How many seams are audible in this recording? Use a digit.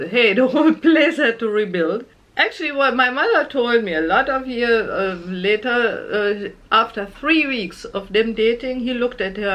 1